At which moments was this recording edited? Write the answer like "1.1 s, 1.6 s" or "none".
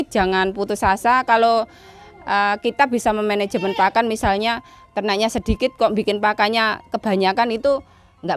none